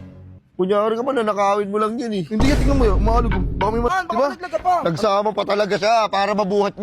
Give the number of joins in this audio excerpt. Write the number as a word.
one